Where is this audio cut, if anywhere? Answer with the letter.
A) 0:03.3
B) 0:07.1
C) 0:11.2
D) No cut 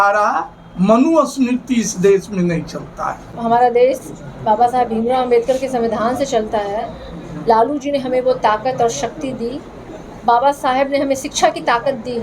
A